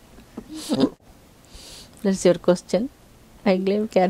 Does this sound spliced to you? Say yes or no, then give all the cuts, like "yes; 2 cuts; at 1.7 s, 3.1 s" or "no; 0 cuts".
yes; 1 cut; at 1.0 s